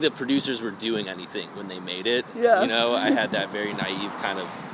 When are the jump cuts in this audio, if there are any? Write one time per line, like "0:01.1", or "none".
none